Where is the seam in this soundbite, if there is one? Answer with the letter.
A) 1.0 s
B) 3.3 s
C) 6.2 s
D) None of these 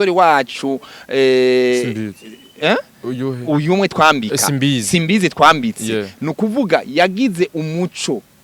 D